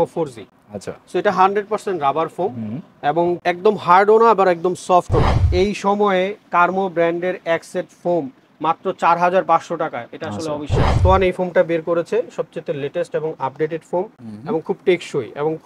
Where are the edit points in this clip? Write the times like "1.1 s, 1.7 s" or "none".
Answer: 5.4 s, 11.0 s

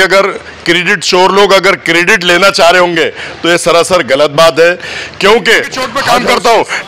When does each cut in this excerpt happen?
5.9 s

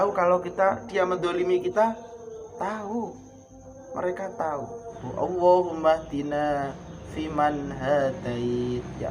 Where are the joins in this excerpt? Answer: 5.0 s

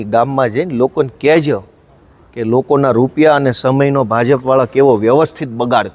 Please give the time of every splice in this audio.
none

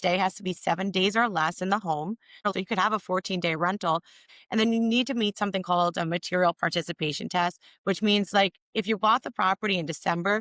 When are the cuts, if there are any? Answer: 2.5 s, 4.3 s

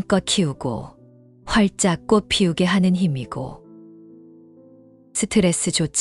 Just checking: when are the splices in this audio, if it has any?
3.6 s, 5.1 s

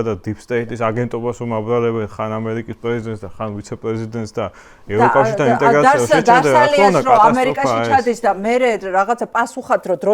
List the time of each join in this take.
none

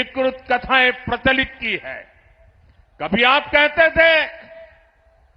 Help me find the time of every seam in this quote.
none

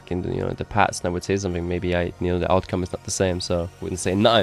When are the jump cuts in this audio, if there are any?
none

